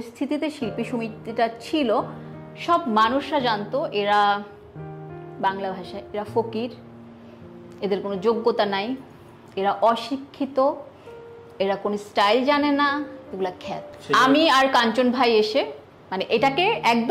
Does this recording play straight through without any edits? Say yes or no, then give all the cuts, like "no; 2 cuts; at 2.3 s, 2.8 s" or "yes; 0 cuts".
yes; 0 cuts